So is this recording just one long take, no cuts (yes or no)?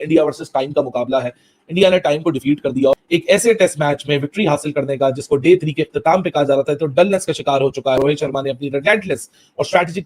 no